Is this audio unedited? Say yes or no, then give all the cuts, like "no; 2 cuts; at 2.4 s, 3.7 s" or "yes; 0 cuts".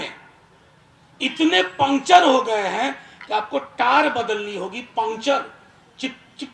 yes; 0 cuts